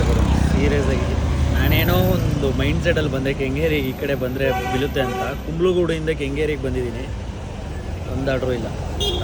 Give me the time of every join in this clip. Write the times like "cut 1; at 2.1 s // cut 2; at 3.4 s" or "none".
none